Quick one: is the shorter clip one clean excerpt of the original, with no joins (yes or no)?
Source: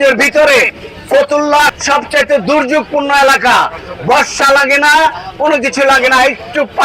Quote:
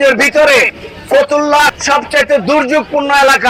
yes